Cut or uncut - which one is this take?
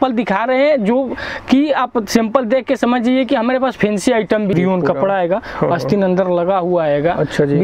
cut